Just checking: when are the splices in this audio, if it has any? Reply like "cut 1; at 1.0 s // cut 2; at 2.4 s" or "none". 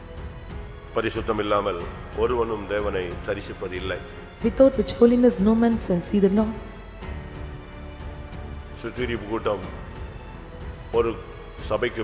cut 1; at 0.9 s